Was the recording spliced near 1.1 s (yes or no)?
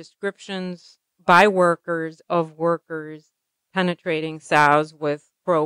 yes